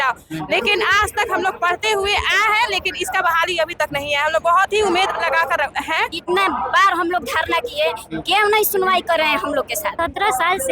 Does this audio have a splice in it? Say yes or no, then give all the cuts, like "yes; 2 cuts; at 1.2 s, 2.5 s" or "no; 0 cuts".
yes; 2 cuts; at 6.2 s, 9.9 s